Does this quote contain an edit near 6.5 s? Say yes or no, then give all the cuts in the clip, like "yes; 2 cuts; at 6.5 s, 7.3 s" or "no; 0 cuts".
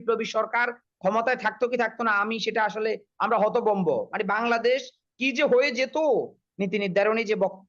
yes; 1 cut; at 6.5 s